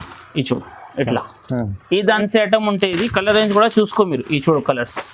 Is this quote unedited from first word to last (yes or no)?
no